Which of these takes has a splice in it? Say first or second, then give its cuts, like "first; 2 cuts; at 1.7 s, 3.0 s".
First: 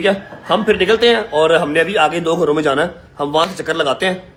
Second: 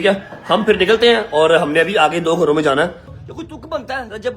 second; 1 cut; at 3.0 s